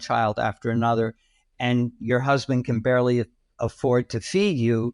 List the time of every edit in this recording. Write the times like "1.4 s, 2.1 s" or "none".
3.4 s